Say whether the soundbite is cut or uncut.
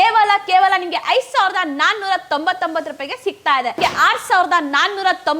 cut